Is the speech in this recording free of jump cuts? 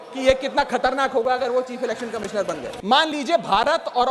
no; 1 cut; at 2.7 s

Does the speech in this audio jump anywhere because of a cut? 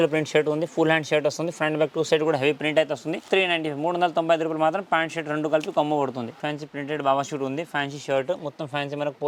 yes; 2 cuts; at 3.3 s, 6.4 s

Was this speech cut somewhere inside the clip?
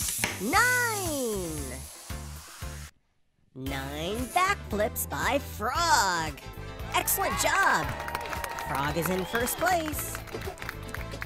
no; 0 cuts

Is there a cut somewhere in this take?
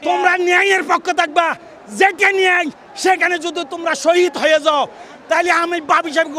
no; 0 cuts

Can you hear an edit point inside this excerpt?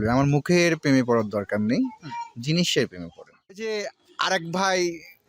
yes; 1 cut; at 3.5 s

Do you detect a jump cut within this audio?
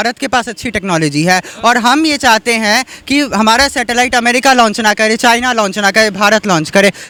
no; 0 cuts

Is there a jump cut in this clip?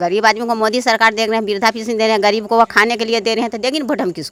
no; 0 cuts

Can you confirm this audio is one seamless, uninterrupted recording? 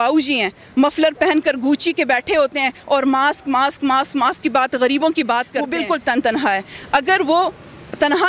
no; 1 cut; at 5.6 s

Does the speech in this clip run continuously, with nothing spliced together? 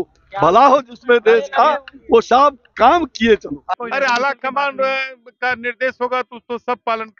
no; 1 cut; at 3.6 s

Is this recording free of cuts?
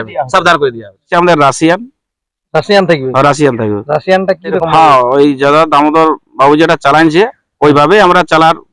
no; 2 cuts; at 1.1 s, 4.6 s

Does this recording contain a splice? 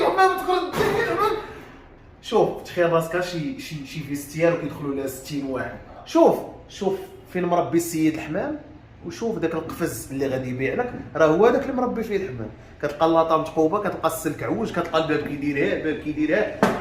yes; 1 cut; at 6.0 s

